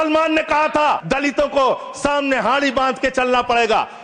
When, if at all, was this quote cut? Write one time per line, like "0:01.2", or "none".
0:01.0